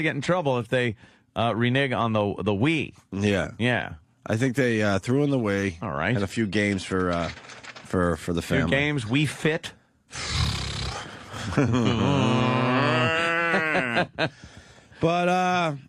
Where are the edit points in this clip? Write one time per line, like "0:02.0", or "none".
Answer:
none